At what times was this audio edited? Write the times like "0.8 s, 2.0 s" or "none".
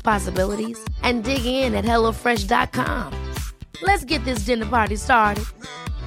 none

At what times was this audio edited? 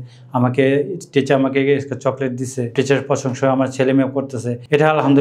2.7 s

